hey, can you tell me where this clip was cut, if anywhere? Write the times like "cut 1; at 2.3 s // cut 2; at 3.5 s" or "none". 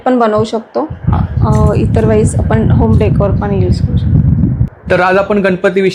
none